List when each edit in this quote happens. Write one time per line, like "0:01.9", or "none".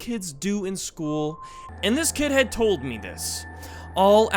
0:01.5